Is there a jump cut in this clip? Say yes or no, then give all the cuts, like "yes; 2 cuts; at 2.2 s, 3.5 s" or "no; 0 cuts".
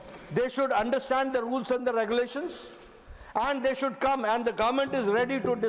no; 0 cuts